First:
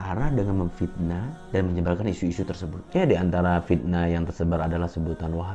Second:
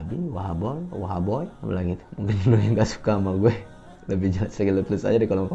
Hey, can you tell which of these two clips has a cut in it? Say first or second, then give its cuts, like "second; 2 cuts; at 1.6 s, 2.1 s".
first; 1 cut; at 2.7 s